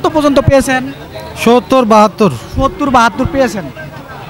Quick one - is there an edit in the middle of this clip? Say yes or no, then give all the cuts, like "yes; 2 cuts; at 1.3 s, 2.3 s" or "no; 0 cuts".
no; 0 cuts